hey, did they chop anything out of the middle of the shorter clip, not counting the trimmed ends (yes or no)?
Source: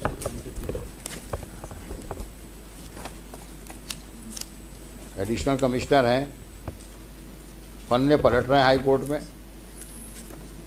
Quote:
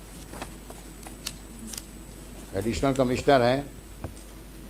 no